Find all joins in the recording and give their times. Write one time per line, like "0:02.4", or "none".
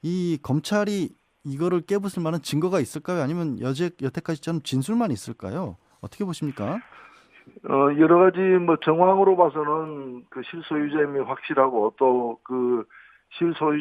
0:05.4